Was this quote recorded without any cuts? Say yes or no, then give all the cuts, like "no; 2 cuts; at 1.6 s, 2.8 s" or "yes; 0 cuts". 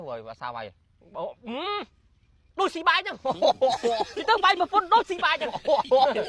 yes; 0 cuts